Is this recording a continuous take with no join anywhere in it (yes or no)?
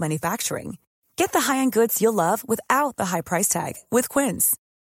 yes